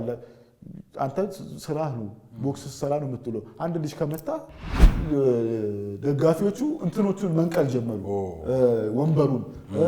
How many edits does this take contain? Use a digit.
1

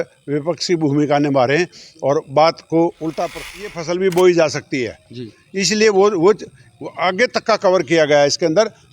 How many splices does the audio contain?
1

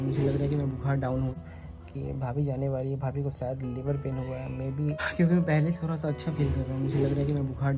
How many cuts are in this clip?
2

